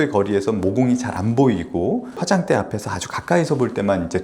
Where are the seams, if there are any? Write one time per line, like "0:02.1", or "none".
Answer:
0:01.1
0:02.2